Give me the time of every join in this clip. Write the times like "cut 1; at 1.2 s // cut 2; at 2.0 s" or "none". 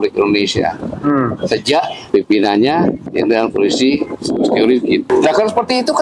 cut 1; at 2.0 s // cut 2; at 3.0 s // cut 3; at 5.1 s